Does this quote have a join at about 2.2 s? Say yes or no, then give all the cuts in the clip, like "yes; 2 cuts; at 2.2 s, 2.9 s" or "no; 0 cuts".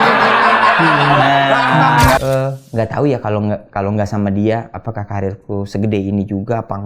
yes; 1 cut; at 2.2 s